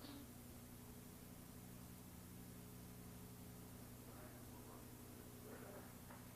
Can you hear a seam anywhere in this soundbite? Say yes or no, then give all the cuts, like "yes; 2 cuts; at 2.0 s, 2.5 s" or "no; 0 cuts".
no; 0 cuts